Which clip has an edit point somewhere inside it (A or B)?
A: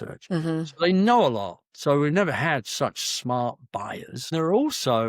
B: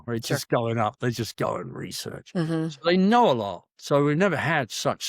A